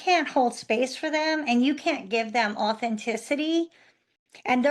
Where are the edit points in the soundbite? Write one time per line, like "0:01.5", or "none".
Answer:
none